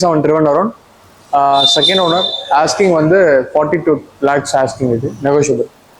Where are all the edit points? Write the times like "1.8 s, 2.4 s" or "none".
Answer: none